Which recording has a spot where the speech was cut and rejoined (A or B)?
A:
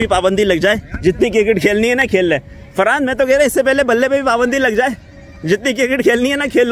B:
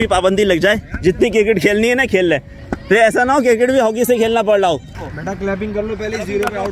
B